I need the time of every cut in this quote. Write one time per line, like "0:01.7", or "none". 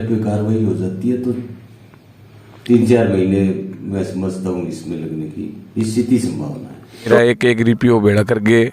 0:07.1